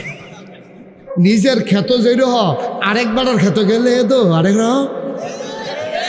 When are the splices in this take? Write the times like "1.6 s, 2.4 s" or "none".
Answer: 1.0 s